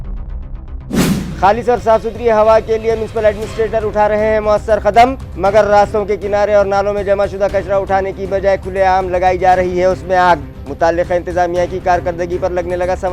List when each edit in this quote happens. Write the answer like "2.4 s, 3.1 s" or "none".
1.0 s